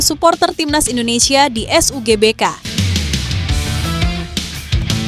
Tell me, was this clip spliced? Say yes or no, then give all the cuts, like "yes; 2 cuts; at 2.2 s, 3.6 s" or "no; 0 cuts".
yes; 1 cut; at 2.7 s